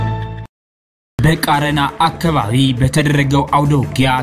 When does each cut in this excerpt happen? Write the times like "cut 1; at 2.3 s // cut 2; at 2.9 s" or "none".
cut 1; at 1.2 s